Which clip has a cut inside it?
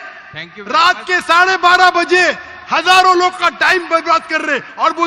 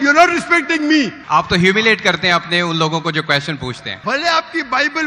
second; 2 cuts; at 1.2 s, 3.9 s

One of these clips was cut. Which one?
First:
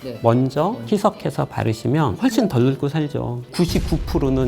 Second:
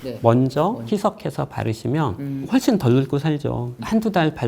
first; 2 cuts; at 2.2 s, 3.5 s

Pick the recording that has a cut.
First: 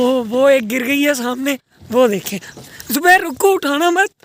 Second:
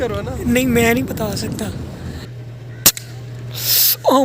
second; 1 cut; at 2.3 s

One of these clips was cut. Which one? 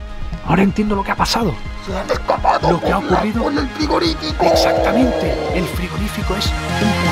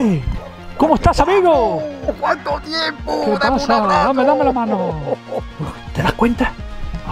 second; 2 cuts; at 2.0 s, 5.5 s

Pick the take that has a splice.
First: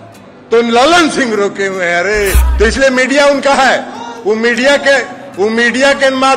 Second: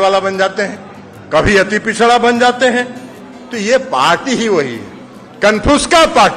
first; 1 cut; at 2.4 s

